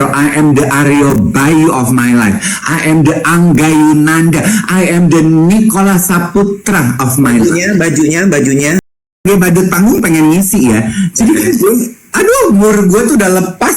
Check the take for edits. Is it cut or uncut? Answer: cut